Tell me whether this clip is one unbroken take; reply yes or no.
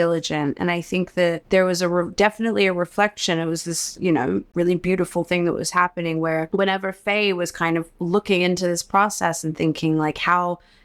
no